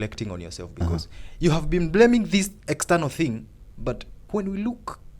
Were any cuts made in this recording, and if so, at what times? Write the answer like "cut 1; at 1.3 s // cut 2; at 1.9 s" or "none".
cut 1; at 4.1 s